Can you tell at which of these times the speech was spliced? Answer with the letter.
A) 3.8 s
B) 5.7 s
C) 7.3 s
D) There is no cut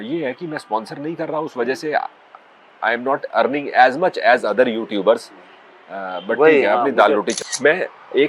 C